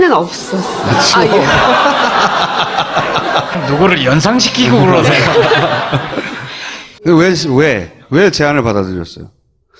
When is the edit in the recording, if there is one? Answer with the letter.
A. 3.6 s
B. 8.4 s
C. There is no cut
A